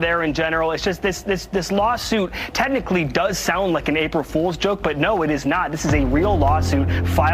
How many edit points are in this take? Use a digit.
0